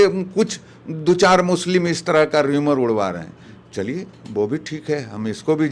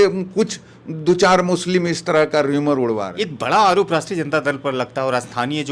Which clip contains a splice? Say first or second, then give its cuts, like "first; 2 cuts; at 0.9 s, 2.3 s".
second; 1 cut; at 3.2 s